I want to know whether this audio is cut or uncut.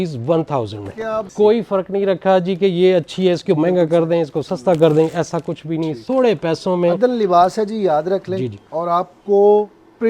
cut